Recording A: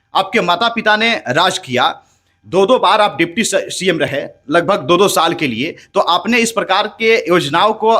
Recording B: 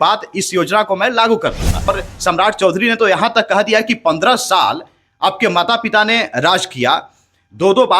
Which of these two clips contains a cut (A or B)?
B